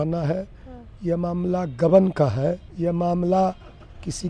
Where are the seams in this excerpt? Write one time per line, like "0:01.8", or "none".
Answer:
0:02.7